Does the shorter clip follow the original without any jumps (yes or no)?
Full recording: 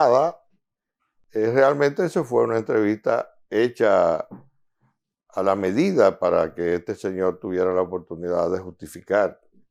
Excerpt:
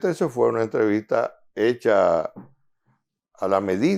yes